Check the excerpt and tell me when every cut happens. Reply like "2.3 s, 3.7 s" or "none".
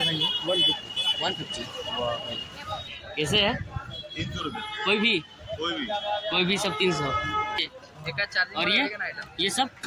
2.9 s, 7.6 s